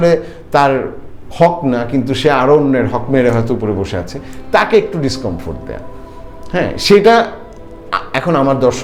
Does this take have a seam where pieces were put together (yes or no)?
no